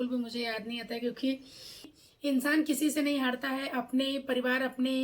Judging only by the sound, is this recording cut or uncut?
cut